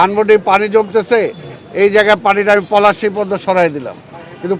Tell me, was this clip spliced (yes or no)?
no